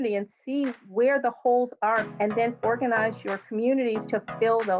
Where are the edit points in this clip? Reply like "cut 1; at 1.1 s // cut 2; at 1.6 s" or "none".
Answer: cut 1; at 2.4 s // cut 2; at 4.0 s